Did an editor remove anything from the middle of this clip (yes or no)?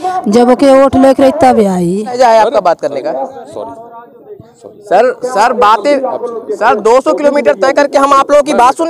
yes